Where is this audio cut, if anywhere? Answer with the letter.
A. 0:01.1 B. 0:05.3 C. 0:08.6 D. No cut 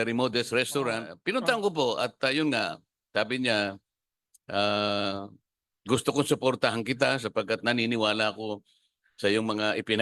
A